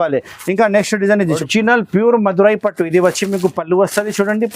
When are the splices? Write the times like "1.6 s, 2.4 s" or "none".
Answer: 1.4 s